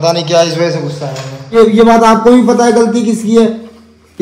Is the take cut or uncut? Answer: cut